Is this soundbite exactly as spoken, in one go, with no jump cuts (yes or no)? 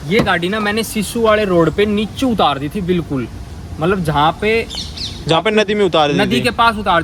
yes